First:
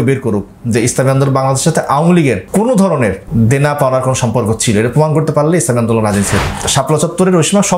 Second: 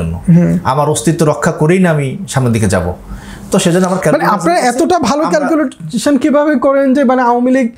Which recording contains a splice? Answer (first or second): first